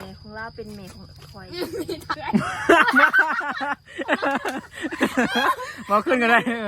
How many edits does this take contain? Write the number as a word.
one